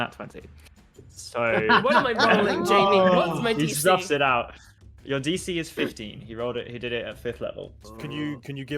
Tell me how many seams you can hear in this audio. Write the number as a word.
one